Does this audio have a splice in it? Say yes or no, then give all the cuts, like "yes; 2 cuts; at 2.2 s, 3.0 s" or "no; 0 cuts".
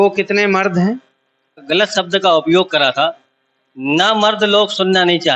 yes; 1 cut; at 1.6 s